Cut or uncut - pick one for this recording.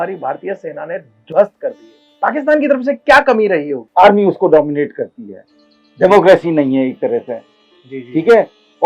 cut